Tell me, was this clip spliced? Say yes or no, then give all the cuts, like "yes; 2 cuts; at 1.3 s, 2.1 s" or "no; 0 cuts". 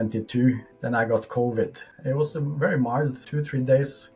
no; 0 cuts